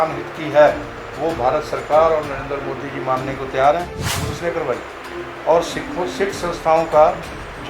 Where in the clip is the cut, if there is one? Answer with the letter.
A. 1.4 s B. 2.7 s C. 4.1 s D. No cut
C